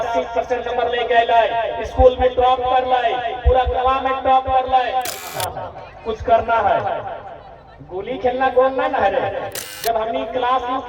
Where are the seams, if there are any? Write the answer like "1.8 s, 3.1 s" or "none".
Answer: 5.2 s, 9.6 s

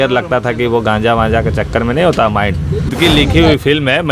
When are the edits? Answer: 2.9 s

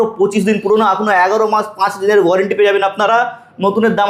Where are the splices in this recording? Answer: none

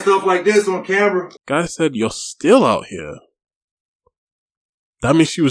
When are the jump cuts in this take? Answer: 1.4 s

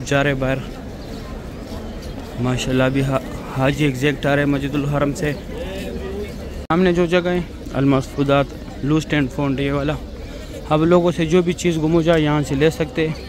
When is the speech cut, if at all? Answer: 6.5 s

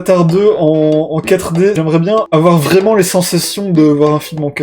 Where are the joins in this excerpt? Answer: 1.8 s

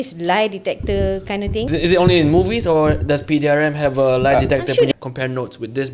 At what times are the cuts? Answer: 1.7 s, 4.9 s

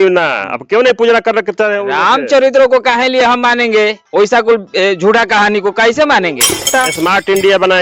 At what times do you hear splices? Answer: 6.9 s

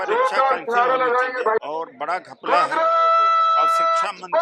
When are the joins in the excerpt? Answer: 1.6 s

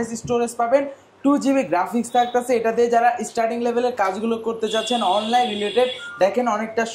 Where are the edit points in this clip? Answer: none

